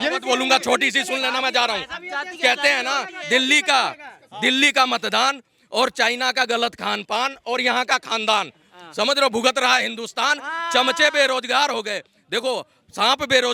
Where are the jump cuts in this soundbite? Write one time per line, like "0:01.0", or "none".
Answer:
none